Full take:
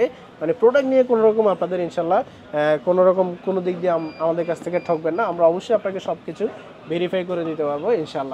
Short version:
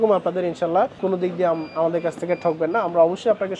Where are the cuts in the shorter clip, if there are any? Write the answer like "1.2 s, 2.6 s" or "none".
1.0 s